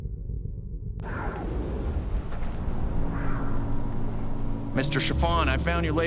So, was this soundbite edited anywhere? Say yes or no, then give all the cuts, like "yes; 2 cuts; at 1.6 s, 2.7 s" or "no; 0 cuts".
no; 0 cuts